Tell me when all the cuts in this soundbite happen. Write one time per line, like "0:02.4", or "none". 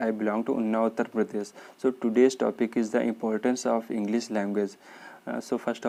none